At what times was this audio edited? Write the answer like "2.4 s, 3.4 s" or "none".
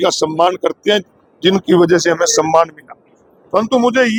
none